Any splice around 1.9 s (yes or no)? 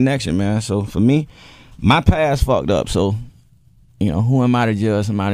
yes